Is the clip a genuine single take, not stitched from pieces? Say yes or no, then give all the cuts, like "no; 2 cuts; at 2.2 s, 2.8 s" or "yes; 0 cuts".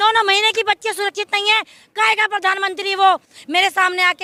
yes; 0 cuts